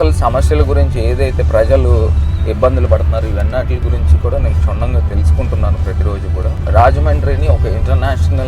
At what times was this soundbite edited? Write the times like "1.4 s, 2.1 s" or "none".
6.6 s

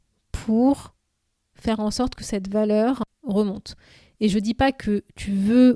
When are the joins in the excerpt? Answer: 3.1 s

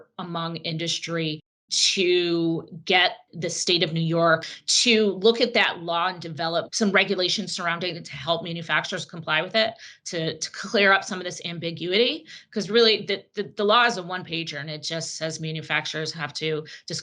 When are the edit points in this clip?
4.5 s

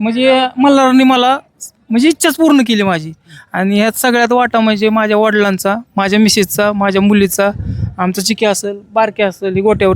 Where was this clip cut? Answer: none

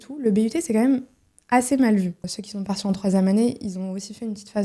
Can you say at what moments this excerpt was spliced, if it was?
2.4 s

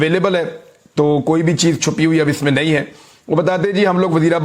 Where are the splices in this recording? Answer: 2.4 s

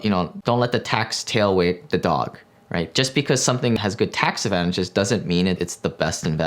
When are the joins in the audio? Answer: 3.8 s, 5.6 s

